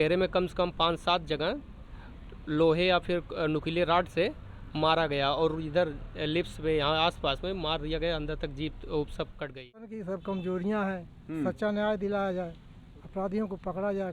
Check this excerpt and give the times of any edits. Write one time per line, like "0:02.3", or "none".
0:10.0